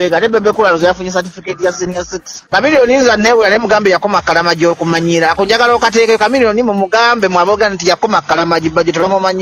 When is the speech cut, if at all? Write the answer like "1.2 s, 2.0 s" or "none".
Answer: 2.4 s